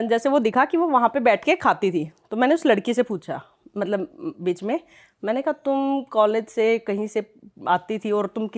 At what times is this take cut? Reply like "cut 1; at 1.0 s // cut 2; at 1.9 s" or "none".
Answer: none